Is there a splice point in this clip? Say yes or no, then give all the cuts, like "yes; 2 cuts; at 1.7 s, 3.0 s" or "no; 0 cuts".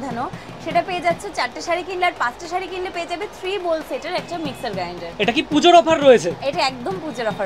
no; 0 cuts